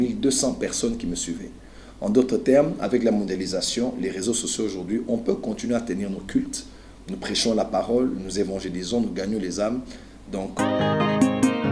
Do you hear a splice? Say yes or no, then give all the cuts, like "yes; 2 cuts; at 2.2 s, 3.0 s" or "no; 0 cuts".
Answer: yes; 1 cut; at 10.5 s